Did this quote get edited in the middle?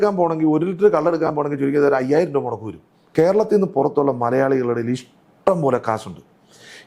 yes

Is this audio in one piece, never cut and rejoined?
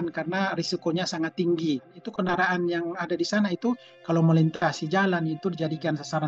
no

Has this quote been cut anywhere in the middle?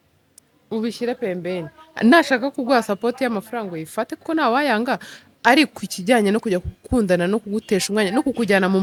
no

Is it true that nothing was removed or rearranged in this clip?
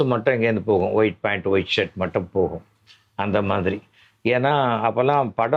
yes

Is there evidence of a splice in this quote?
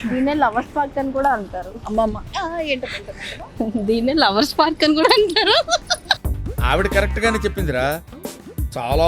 no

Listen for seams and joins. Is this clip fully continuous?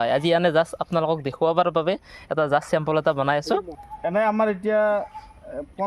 no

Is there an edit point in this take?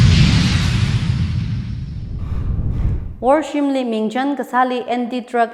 no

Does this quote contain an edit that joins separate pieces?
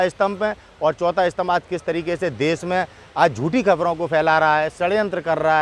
no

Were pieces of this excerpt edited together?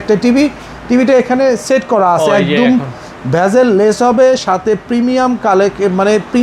no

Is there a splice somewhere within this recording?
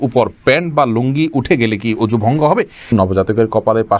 yes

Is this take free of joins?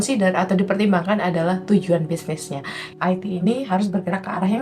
no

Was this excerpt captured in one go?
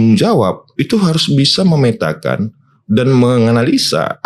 yes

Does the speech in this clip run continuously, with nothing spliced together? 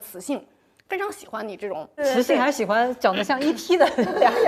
no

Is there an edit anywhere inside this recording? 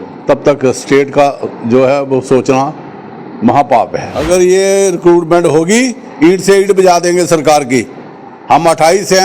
yes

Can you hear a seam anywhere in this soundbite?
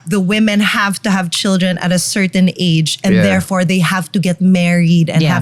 no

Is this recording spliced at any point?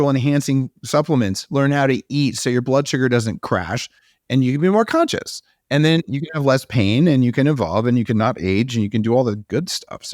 no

